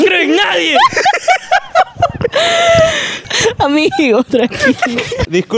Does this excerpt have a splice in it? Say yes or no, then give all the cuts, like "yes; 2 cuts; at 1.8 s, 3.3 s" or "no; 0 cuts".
yes; 1 cut; at 3.3 s